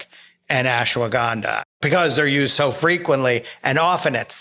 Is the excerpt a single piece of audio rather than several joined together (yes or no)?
no